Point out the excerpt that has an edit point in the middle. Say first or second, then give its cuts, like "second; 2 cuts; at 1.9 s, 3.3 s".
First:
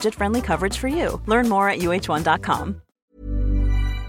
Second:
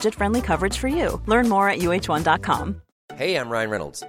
first; 1 cut; at 3.1 s